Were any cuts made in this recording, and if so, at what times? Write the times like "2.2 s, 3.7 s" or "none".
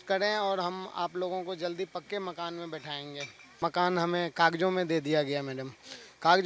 3.5 s